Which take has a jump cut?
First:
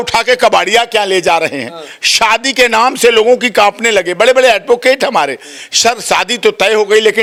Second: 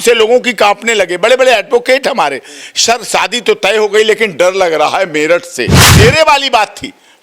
second; 1 cut; at 5.9 s

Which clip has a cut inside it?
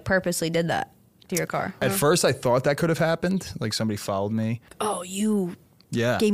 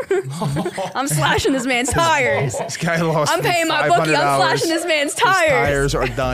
first; 2 cuts; at 1.8 s, 4.7 s

